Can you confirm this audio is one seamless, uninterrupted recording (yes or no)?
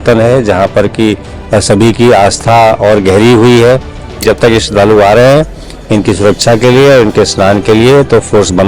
no